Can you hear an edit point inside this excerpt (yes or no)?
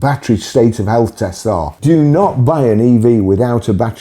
yes